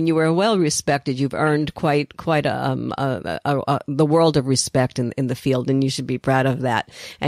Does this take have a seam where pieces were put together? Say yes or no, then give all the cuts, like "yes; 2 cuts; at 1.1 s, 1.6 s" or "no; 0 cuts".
no; 0 cuts